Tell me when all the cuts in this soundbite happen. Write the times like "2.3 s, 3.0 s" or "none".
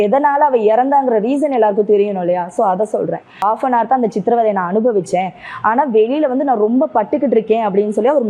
3.4 s